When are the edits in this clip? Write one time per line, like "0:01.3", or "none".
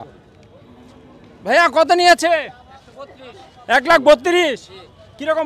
none